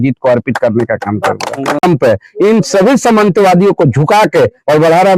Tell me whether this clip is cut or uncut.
cut